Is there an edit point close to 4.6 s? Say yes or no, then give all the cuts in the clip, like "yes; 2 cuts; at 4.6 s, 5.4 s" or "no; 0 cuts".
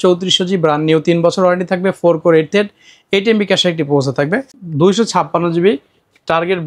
yes; 1 cut; at 4.6 s